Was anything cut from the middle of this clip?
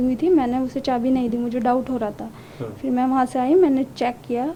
no; 0 cuts

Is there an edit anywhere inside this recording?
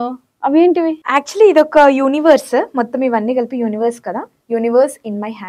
yes; 2 cuts; at 1.0 s, 4.3 s

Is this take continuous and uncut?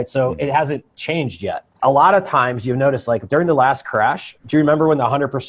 no; 2 cuts; at 1.7 s, 4.3 s

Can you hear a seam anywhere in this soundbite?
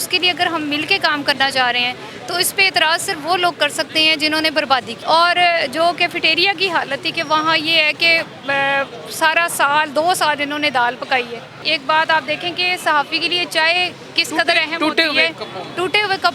yes; 2 cuts; at 4.9 s, 11.7 s

